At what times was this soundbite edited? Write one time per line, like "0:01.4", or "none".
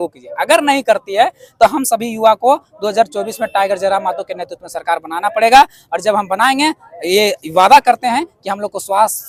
none